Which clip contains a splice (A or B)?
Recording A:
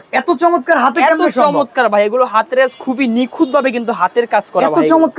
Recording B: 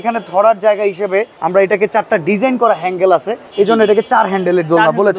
B